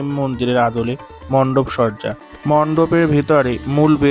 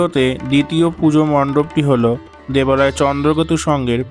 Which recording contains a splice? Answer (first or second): first